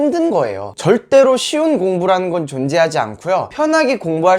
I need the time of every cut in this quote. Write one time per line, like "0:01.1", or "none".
none